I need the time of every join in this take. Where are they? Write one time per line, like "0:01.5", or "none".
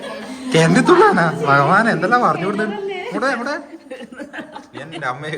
none